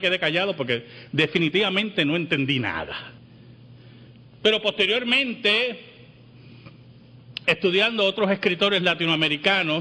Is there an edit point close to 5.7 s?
no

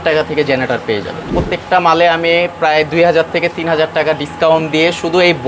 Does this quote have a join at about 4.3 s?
no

